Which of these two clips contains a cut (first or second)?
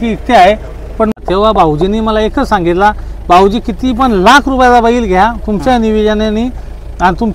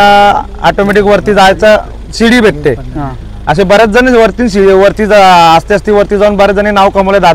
first